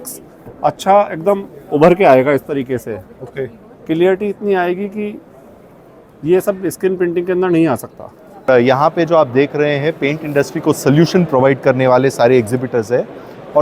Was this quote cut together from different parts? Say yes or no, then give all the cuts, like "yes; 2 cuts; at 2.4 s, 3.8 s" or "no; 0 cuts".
yes; 1 cut; at 8.5 s